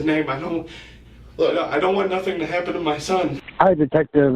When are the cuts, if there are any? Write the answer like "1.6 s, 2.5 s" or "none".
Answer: 3.3 s

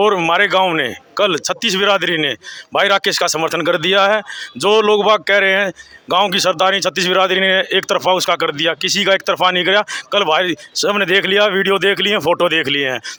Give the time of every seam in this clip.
none

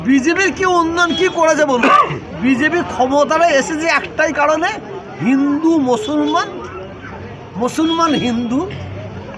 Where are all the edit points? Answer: none

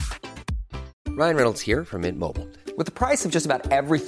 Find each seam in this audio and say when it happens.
0.9 s

